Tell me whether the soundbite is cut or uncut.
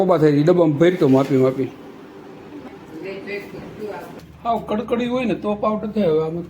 cut